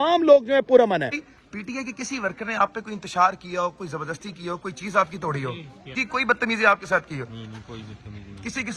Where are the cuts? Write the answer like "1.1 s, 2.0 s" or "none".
1.2 s, 5.9 s